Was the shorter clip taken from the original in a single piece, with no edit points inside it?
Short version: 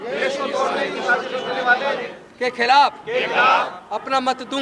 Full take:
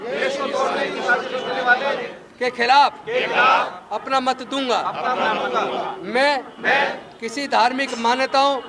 yes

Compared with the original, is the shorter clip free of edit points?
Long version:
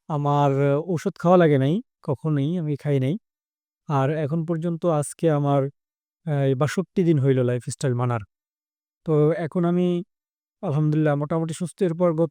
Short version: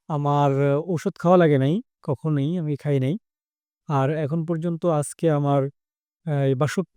yes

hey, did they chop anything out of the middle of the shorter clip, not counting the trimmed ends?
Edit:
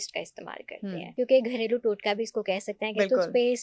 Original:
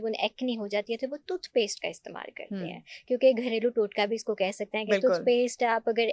yes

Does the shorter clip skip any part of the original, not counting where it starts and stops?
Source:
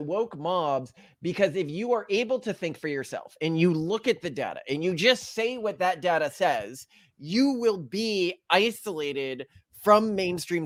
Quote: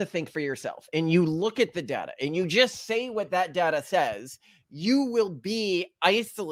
no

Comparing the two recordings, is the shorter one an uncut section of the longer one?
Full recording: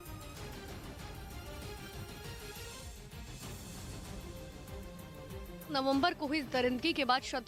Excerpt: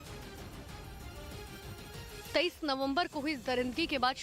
no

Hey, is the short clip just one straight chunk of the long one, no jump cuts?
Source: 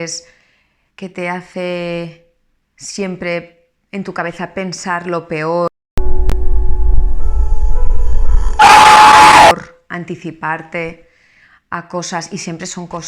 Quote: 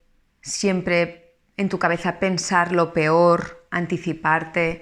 no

